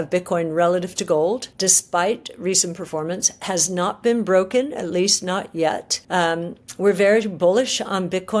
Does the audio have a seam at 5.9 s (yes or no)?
yes